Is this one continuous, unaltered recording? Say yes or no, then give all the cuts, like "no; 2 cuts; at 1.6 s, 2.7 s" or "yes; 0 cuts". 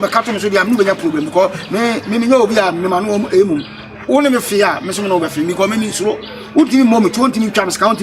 yes; 0 cuts